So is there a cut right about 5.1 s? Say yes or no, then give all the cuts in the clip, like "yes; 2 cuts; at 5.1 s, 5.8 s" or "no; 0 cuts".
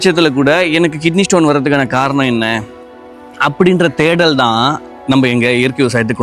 no; 0 cuts